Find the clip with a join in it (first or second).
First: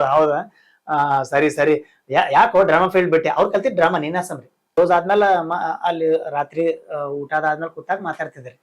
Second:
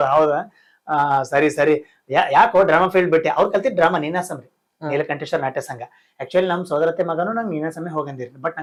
first